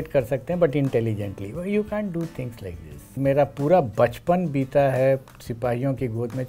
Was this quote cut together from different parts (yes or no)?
yes